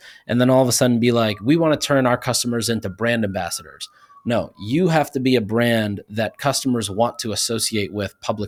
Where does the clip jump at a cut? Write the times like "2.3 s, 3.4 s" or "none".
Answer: none